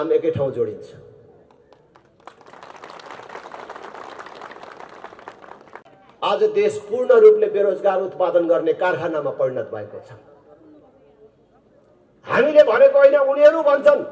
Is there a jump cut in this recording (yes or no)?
yes